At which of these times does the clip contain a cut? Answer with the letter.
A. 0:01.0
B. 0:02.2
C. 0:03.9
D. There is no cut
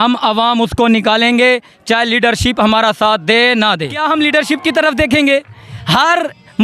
C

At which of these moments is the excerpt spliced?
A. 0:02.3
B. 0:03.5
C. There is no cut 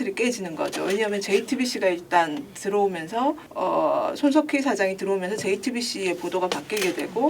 B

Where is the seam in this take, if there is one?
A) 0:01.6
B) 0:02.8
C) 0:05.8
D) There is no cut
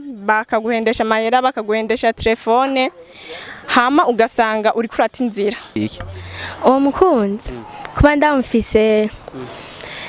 C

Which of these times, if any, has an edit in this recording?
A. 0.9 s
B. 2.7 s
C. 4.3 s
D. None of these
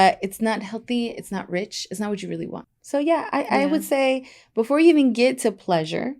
B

